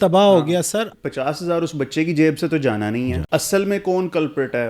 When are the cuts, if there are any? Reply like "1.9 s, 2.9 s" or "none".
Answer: 0.9 s, 3.2 s